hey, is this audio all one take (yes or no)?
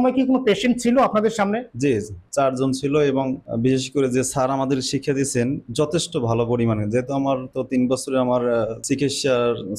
yes